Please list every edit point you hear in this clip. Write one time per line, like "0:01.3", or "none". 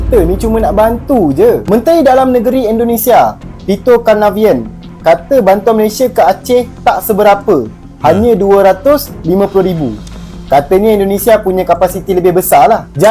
none